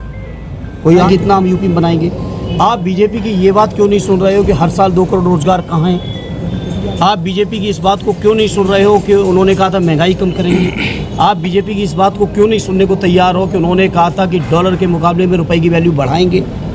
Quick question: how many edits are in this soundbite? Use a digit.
1